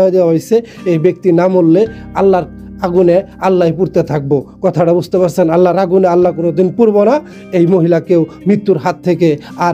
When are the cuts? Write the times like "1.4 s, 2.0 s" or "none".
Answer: none